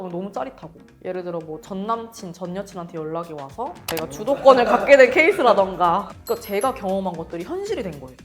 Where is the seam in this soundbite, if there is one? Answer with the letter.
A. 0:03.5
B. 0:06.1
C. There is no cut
B